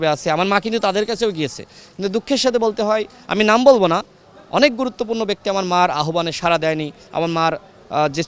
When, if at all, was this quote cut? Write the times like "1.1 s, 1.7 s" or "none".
none